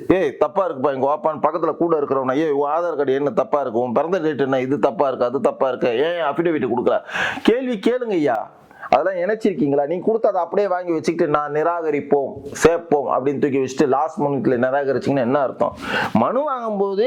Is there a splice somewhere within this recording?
no; 0 cuts

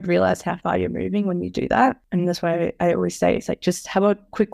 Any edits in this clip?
yes; 1 cut; at 2.0 s

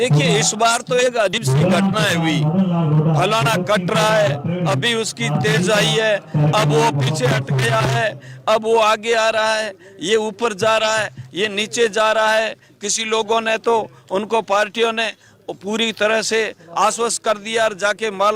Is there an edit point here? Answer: yes; 1 cut; at 1.4 s

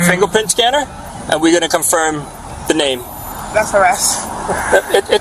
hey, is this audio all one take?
yes; 0 cuts

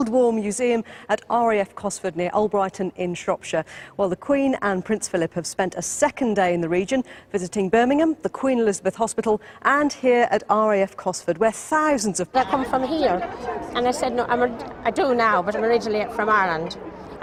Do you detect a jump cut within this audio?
no; 0 cuts

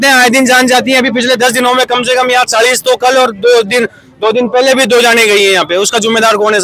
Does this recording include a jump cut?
no; 0 cuts

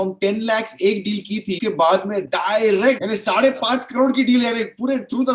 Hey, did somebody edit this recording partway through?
yes; 2 cuts; at 1.6 s, 3.0 s

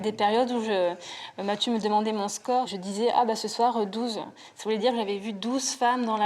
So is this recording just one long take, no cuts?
no; 1 cut; at 2.7 s

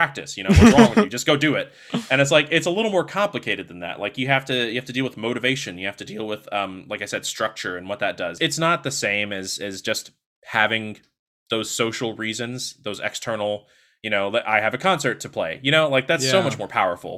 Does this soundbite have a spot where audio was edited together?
yes; 1 cut; at 8.3 s

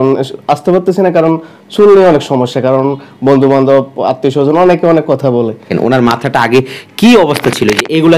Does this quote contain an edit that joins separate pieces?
yes; 1 cut; at 5.7 s

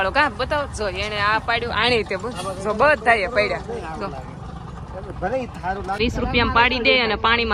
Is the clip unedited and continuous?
yes; 0 cuts

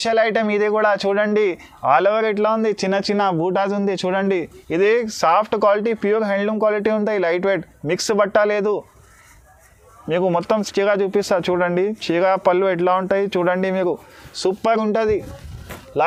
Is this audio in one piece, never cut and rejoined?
yes; 0 cuts

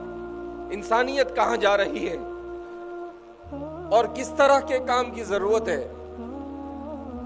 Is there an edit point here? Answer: no; 0 cuts

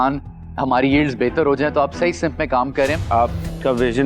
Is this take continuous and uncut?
no; 1 cut; at 3.0 s

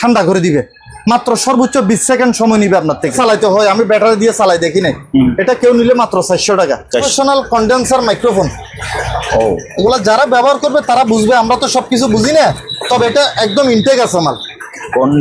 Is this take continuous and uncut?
no; 2 cuts; at 3.1 s, 7.1 s

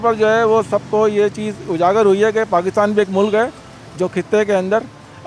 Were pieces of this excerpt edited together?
no; 0 cuts

